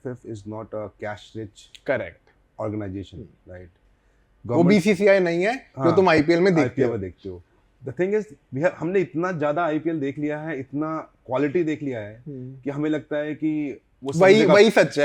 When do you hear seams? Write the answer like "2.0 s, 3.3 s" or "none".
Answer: none